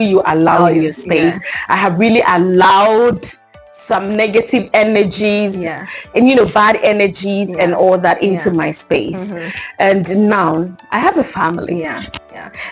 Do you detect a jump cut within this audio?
no; 0 cuts

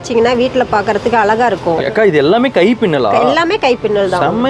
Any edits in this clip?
yes; 1 cut; at 1.8 s

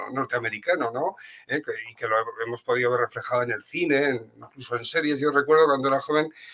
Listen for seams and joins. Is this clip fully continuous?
yes; 0 cuts

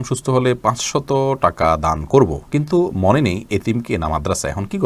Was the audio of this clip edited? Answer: no; 0 cuts

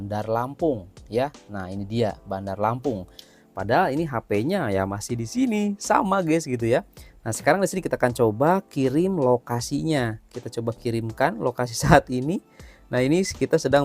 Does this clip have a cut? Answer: no; 0 cuts

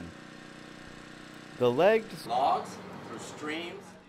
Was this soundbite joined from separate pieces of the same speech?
no; 0 cuts

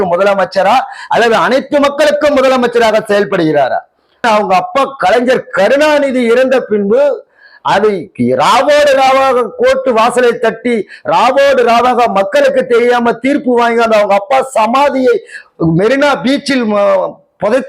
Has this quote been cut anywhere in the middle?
yes; 1 cut; at 4.2 s

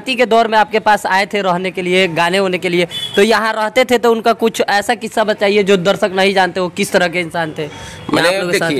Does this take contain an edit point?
no; 0 cuts

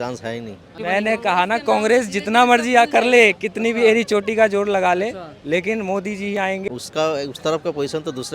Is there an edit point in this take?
yes; 2 cuts; at 0.8 s, 6.6 s

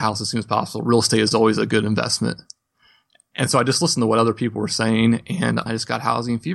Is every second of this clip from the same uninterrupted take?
no; 1 cut; at 5.6 s

